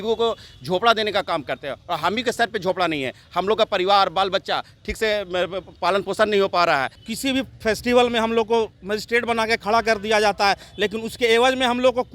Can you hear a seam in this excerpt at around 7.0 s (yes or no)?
yes